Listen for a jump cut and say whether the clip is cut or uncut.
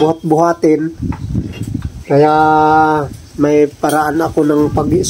uncut